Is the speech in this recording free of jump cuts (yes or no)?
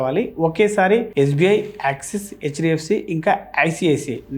yes